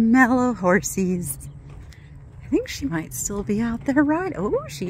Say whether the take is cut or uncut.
uncut